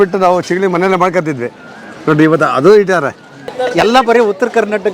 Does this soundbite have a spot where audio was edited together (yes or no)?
yes